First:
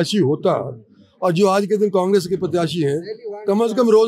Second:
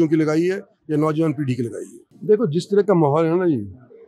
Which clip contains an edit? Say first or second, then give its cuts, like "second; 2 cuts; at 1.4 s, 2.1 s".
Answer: second; 1 cut; at 2.1 s